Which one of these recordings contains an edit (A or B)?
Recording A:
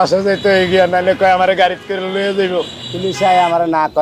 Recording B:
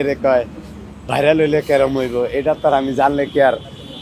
A